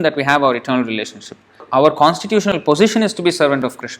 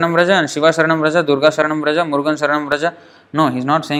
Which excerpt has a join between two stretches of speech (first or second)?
first